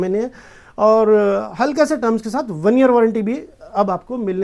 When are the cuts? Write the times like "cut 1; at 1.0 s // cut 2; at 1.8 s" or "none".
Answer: none